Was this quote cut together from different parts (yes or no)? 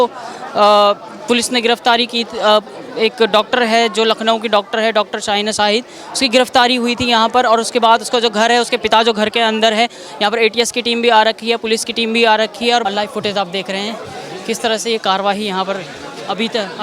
yes